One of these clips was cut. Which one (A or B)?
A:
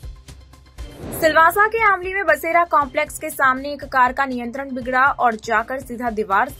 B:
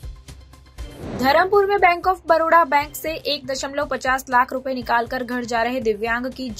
B